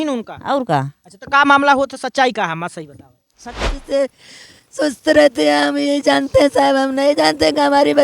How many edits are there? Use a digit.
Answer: 1